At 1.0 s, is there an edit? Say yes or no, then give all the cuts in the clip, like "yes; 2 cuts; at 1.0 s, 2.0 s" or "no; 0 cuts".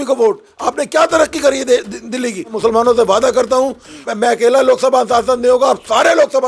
no; 2 cuts; at 2.5 s, 4.0 s